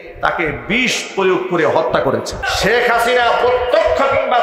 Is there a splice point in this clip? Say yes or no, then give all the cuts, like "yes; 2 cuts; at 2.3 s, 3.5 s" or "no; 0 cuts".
yes; 1 cut; at 2.4 s